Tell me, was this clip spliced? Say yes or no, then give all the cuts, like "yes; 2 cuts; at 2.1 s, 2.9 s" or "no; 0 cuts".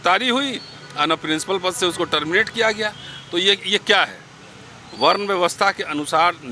no; 0 cuts